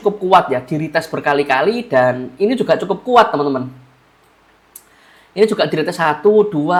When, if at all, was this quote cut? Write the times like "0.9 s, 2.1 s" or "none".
none